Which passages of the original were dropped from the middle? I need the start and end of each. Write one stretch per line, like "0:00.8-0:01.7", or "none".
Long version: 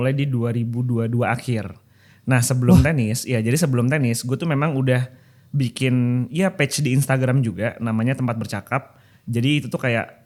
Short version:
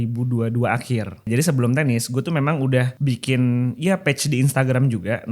0:01.9-0:03.4
0:05.1-0:05.5